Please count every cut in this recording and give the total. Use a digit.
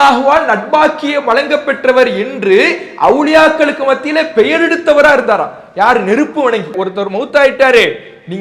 1